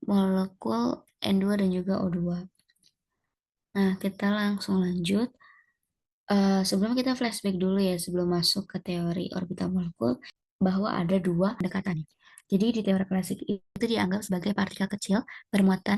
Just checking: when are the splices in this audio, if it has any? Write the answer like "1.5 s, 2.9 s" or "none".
10.4 s, 11.7 s, 13.8 s